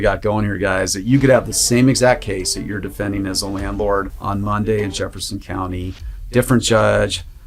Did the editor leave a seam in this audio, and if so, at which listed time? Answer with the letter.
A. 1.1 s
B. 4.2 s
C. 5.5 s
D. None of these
B